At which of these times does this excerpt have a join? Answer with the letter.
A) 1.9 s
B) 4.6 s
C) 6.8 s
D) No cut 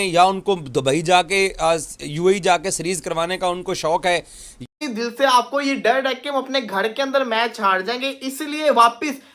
B